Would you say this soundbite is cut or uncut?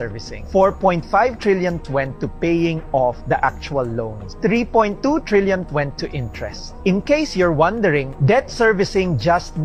uncut